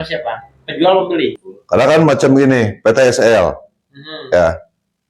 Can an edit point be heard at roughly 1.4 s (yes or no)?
yes